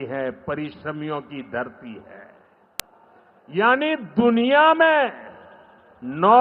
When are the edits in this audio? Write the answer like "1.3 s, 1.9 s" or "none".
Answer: 2.8 s

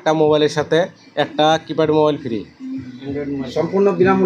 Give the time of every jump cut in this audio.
none

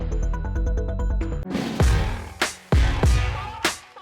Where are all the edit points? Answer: 1.5 s

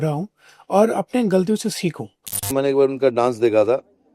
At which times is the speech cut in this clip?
2.5 s

